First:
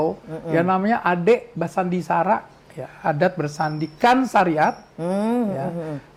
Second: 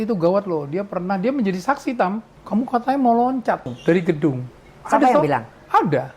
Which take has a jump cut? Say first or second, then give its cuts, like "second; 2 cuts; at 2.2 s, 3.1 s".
second; 2 cuts; at 2.3 s, 3.8 s